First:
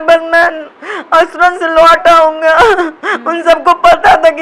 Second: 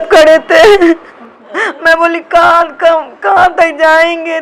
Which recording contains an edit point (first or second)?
second